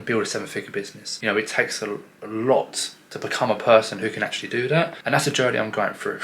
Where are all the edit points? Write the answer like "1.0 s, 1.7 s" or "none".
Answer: 1.0 s, 5.0 s